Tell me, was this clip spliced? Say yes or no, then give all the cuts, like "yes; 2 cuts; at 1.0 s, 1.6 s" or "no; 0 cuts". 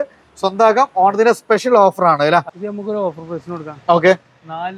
yes; 1 cut; at 2.5 s